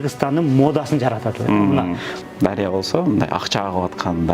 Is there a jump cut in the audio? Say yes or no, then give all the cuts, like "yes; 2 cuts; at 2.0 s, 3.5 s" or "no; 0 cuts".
yes; 1 cut; at 2.1 s